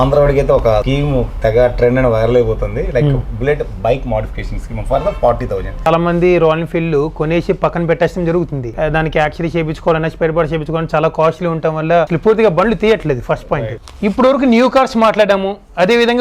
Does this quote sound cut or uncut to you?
cut